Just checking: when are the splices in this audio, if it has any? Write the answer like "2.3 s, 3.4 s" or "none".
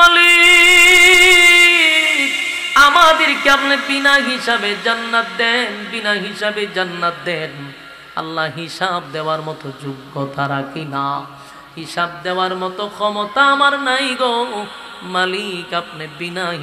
none